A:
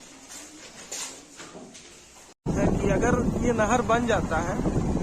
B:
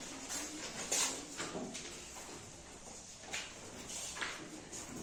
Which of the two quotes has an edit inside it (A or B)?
A